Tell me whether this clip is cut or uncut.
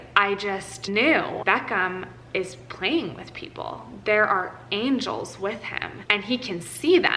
uncut